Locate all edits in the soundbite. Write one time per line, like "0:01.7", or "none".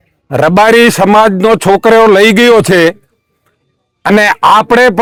none